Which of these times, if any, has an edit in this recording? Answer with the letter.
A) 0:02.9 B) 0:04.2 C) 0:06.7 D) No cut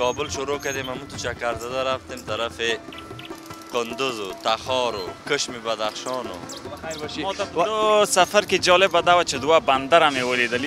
C